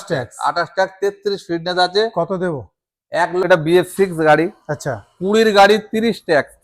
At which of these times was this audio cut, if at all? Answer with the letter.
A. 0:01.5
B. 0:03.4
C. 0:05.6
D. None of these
B